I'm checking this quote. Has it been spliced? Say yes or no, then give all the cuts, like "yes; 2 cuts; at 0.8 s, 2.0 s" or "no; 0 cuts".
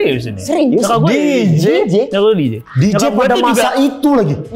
no; 0 cuts